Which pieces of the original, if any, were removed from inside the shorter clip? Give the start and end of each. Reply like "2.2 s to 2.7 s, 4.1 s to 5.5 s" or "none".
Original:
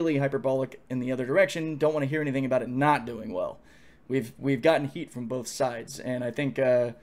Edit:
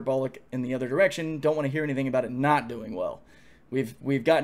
none